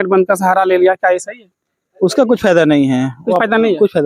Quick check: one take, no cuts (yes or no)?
yes